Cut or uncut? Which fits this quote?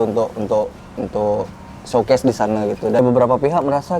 cut